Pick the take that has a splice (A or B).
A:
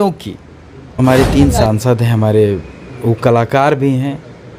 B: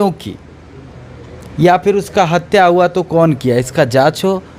A